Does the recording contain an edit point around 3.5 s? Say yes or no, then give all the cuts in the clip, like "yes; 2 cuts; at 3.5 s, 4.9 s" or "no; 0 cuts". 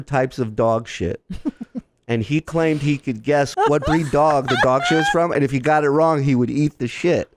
yes; 1 cut; at 3.5 s